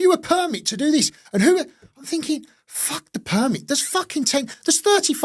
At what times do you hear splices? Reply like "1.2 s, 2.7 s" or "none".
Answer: none